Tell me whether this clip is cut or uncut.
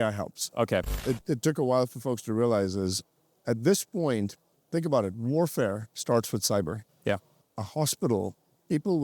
cut